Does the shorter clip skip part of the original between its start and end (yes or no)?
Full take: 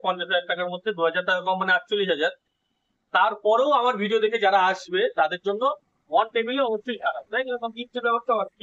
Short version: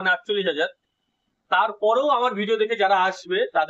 no